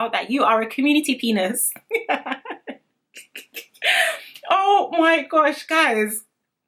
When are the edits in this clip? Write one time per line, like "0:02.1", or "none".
none